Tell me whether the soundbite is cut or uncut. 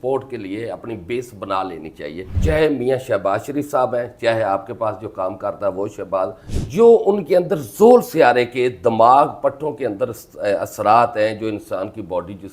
cut